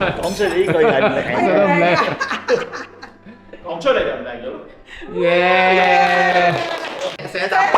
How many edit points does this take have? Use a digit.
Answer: 0